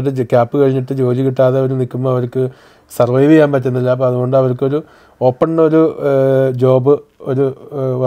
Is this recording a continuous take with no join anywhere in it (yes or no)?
yes